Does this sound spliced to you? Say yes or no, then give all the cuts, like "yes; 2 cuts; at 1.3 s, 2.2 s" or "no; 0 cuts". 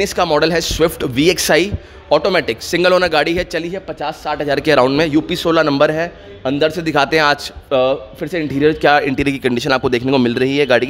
no; 0 cuts